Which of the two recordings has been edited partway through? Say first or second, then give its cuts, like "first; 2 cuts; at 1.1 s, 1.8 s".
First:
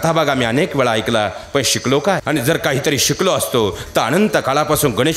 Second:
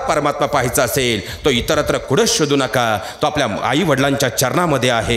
first; 1 cut; at 2.2 s